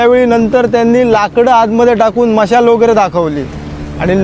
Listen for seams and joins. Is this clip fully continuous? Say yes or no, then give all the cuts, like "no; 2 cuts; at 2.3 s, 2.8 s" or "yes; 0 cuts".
yes; 0 cuts